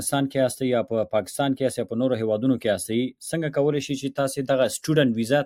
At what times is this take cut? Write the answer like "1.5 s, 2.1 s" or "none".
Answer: none